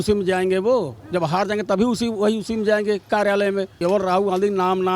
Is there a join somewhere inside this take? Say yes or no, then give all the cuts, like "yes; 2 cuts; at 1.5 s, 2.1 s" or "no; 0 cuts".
yes; 1 cut; at 3.7 s